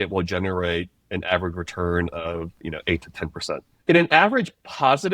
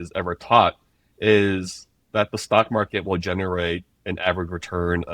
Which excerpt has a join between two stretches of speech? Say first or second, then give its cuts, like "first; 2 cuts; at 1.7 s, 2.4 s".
first; 1 cut; at 3.7 s